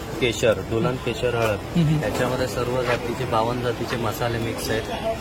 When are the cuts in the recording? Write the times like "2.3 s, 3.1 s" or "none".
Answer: none